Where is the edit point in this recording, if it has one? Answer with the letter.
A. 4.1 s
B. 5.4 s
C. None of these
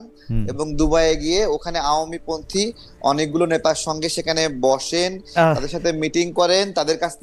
C